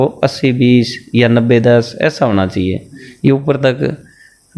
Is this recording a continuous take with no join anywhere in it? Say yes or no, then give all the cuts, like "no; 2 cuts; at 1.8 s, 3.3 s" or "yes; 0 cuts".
yes; 0 cuts